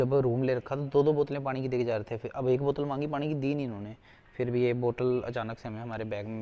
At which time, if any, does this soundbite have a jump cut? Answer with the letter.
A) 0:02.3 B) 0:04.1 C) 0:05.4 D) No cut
D